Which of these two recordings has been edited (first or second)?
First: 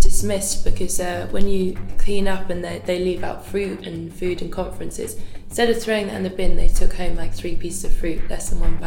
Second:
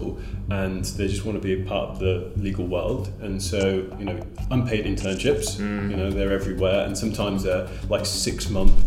first